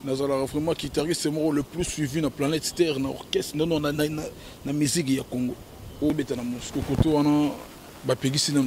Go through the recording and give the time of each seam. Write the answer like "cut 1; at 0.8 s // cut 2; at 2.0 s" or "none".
cut 1; at 6.1 s